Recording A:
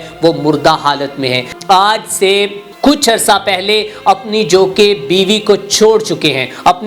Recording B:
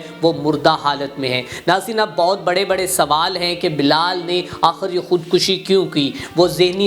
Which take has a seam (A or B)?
A